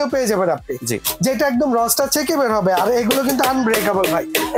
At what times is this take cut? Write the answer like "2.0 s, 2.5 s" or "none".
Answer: none